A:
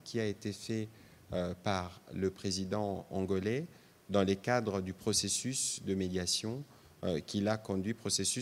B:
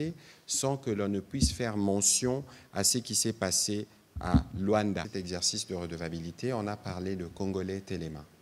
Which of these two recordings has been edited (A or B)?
B